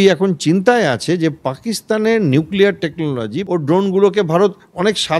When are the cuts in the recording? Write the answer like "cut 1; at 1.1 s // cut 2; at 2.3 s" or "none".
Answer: cut 1; at 3.4 s